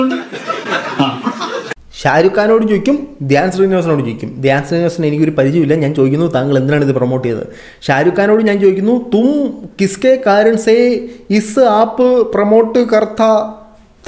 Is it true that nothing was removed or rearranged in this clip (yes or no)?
yes